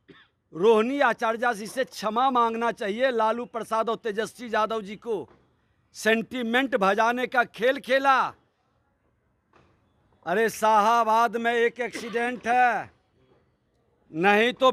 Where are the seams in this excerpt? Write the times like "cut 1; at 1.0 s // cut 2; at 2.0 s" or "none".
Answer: none